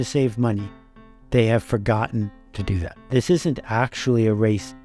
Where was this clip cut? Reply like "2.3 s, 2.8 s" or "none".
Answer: 2.9 s